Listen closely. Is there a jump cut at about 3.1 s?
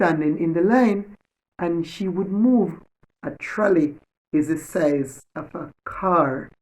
yes; 1 cut; at 3.1 s

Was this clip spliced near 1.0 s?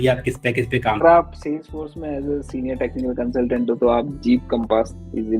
yes; 1 cut; at 1.0 s

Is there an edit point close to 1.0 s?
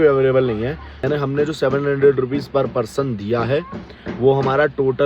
yes; 1 cut; at 1.0 s

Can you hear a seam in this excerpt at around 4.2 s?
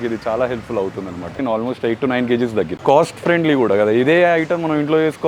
no; 2 cuts; at 1.4 s, 2.8 s

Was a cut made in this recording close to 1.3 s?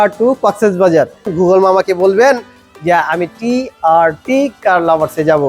yes; 1 cut; at 1.3 s

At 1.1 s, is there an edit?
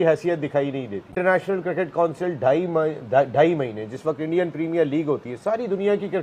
yes; 1 cut; at 1.1 s

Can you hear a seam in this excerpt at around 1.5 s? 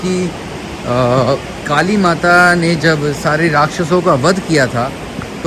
no; 0 cuts

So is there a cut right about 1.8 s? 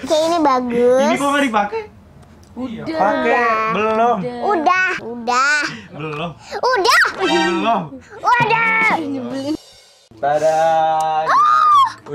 no; 2 cuts; at 5.0 s, 9.6 s

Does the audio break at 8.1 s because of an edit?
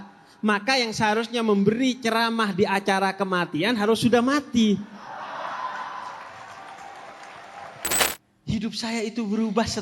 yes; 1 cut; at 8.1 s

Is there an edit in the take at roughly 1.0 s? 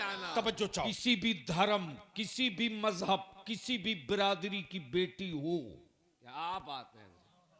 yes; 1 cut; at 1.0 s

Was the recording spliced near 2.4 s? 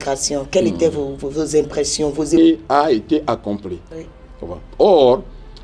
yes; 1 cut; at 2.4 s

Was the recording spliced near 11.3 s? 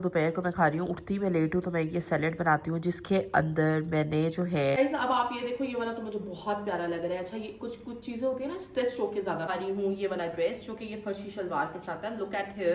no; 2 cuts; at 4.8 s, 9.5 s

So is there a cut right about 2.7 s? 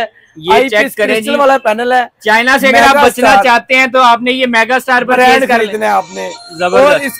no; 0 cuts

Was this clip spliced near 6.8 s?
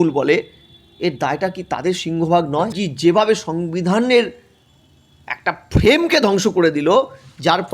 no; 1 cut; at 2.7 s

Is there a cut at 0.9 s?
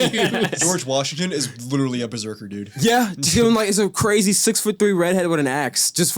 no; 1 cut; at 2.6 s

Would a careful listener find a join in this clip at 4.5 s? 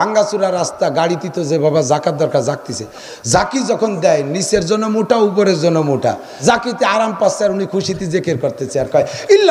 no; 1 cut; at 6.3 s

